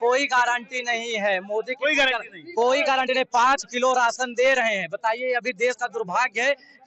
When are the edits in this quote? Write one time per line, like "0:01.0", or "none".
none